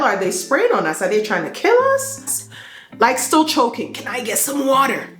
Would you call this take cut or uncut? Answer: cut